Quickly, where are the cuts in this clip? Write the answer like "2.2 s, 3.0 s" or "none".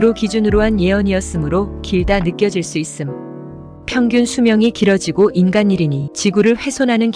6.0 s

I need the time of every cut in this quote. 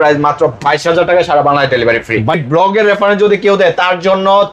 2.4 s

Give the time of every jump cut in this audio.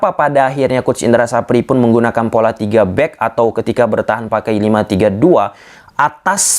none

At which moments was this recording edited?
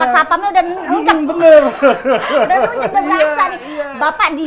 none

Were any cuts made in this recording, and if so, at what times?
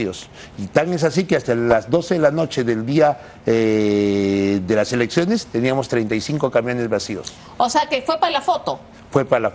none

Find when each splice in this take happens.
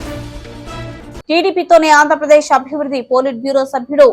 1.1 s

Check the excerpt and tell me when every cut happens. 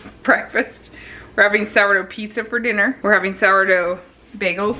3.0 s

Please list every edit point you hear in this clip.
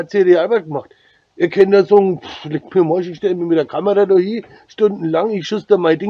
none

